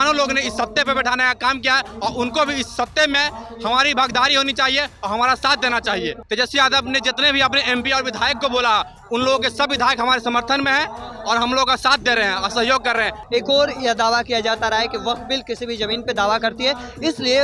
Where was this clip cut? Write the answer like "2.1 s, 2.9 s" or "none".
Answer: 6.2 s, 13.2 s